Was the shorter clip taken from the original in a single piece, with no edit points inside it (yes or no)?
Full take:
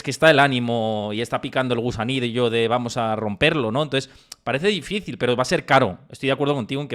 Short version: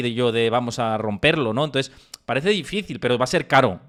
yes